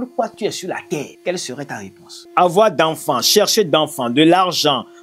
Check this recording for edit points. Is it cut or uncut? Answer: cut